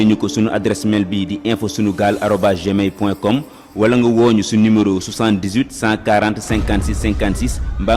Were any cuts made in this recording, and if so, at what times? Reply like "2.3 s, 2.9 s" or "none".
none